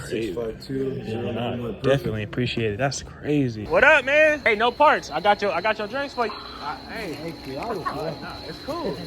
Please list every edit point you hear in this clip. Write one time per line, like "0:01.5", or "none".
0:03.6
0:04.4
0:06.3